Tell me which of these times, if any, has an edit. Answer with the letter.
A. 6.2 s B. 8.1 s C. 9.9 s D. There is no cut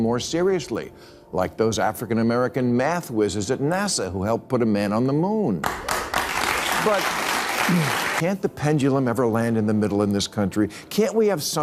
B